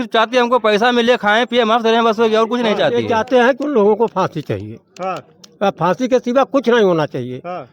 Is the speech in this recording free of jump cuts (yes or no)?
no